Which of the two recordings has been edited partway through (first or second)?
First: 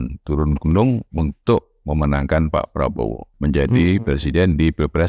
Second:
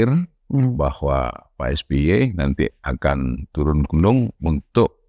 first